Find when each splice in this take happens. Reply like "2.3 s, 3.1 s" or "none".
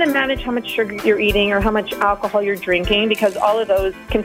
1.0 s